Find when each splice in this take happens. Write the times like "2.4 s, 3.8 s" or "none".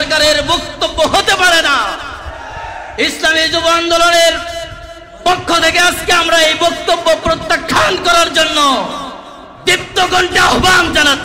none